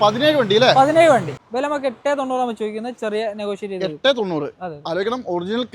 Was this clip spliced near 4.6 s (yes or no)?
no